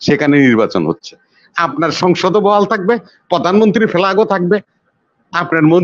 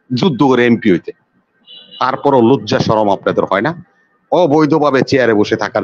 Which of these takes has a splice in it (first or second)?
second